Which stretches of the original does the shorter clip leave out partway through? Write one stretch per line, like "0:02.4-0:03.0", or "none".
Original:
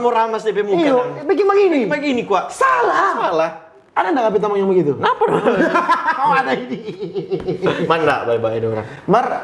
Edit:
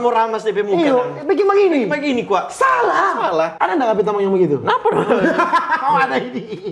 0:03.5-0:03.9